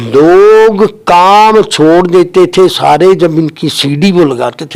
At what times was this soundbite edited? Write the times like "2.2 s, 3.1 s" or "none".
none